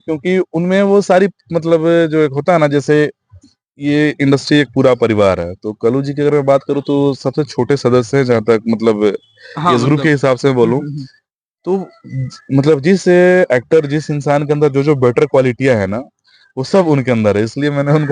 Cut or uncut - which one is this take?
uncut